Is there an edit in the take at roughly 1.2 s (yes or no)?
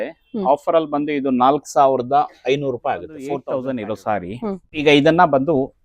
no